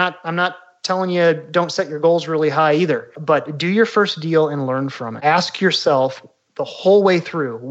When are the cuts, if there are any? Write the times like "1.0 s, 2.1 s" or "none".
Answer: 3.1 s, 5.1 s